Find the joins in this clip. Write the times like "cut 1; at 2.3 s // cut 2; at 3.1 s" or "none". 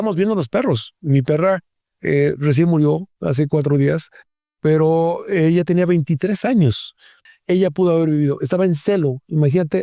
cut 1; at 7.2 s